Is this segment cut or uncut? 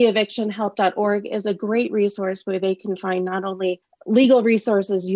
uncut